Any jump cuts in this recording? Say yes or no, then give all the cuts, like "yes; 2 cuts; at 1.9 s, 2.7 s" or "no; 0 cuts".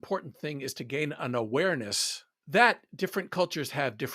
no; 0 cuts